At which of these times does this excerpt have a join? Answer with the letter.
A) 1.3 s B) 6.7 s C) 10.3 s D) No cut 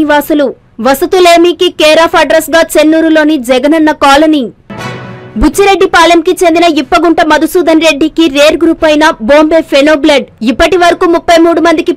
D